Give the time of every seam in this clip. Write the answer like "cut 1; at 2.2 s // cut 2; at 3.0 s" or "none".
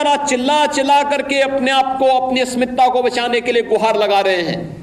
none